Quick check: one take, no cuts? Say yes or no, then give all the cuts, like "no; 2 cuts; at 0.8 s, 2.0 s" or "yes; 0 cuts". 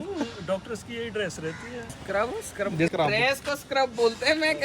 no; 2 cuts; at 2.0 s, 2.9 s